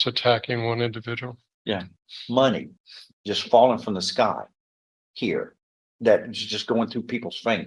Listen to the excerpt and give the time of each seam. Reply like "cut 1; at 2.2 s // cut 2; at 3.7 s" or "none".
cut 1; at 2.1 s